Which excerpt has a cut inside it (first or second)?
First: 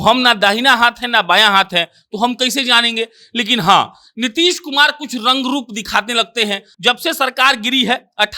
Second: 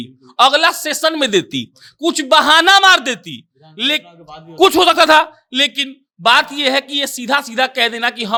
first